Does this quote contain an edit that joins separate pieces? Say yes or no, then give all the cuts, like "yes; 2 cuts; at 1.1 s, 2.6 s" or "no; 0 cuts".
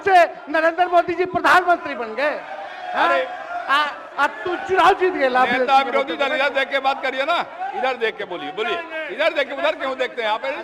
no; 0 cuts